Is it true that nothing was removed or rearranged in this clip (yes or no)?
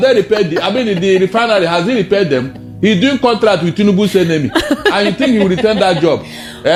yes